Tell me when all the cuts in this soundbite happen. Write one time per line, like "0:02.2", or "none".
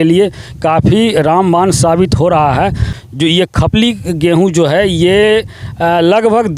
0:02.9